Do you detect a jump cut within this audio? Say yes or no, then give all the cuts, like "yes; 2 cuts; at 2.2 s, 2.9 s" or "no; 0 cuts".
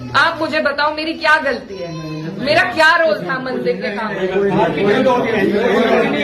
no; 0 cuts